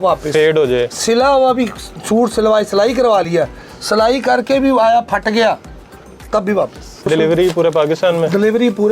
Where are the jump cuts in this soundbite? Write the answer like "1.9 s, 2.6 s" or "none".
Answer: 7.1 s